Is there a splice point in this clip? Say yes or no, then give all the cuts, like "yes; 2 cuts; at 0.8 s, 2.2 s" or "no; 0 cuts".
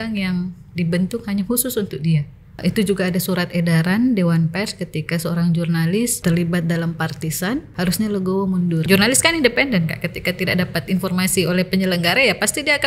yes; 4 cuts; at 2.6 s, 6.2 s, 7.7 s, 8.8 s